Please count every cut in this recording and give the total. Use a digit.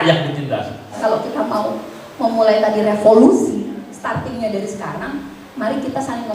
1